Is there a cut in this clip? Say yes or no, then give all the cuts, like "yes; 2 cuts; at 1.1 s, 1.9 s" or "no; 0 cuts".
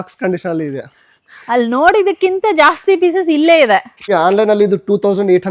yes; 1 cut; at 4.1 s